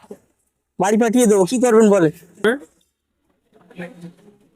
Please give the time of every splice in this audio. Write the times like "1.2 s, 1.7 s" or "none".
2.5 s